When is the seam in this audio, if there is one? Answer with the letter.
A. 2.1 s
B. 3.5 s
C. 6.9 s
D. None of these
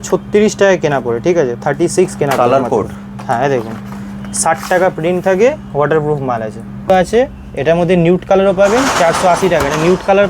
C